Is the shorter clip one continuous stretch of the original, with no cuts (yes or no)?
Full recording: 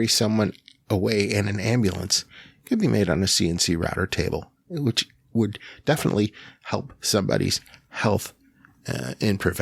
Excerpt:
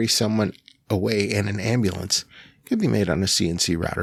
yes